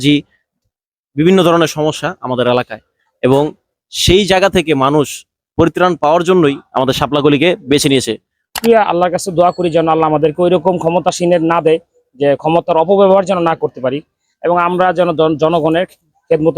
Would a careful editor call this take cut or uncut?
cut